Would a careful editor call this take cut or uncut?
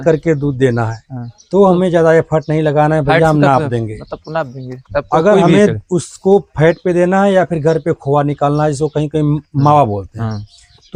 uncut